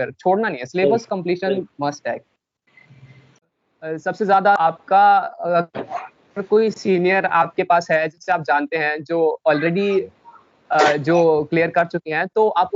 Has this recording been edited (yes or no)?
yes